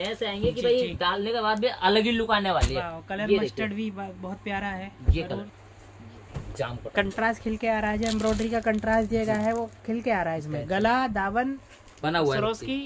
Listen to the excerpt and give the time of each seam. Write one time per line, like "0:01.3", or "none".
0:05.4